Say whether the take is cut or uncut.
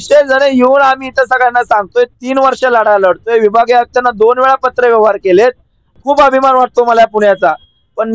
cut